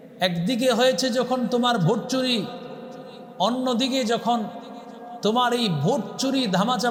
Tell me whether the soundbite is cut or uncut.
uncut